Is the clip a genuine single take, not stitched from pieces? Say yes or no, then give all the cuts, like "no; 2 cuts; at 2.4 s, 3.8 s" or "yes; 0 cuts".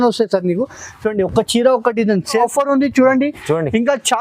no; 1 cut; at 2.4 s